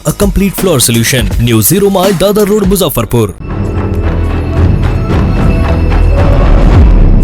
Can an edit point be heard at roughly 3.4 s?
yes; 1 cut; at 3.4 s

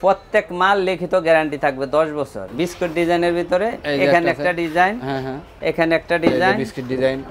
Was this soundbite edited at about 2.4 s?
yes; 1 cut; at 2.4 s

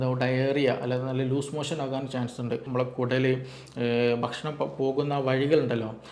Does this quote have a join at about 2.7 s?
yes; 1 cut; at 2.7 s

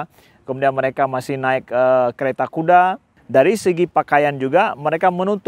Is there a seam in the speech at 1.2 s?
no; 1 cut; at 3.1 s

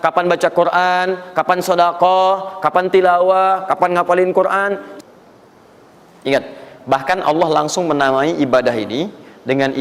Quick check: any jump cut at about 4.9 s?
yes; 1 cut; at 4.9 s

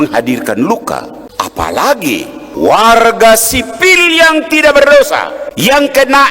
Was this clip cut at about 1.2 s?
yes; 3 cuts; at 1.2 s, 2.4 s, 5.4 s

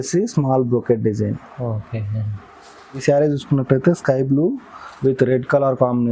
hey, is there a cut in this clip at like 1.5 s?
no; 1 cut; at 3.0 s

